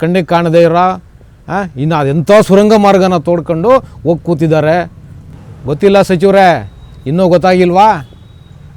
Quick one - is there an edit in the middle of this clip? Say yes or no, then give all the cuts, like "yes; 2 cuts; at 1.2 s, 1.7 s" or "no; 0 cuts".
yes; 1 cut; at 5.4 s